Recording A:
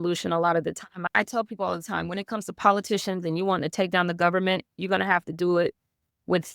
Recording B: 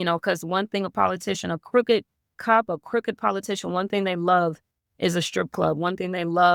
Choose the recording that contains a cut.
A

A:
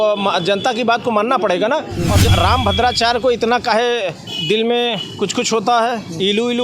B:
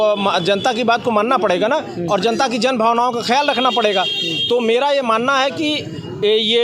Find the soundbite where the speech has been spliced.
A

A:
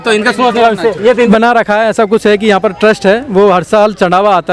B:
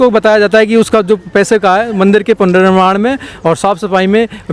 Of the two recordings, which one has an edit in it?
A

